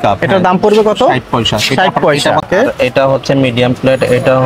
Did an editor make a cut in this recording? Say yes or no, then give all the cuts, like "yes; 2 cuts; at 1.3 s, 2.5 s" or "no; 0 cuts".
yes; 1 cut; at 2.4 s